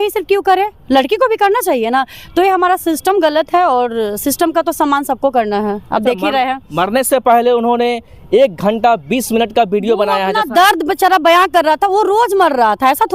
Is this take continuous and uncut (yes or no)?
yes